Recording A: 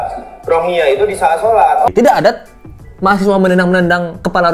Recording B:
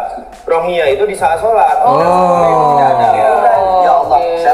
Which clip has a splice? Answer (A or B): A